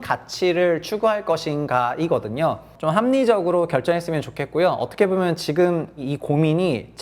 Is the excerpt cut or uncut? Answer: cut